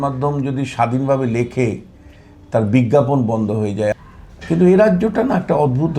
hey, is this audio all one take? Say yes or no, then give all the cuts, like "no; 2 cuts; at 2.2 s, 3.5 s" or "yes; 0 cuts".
no; 1 cut; at 3.9 s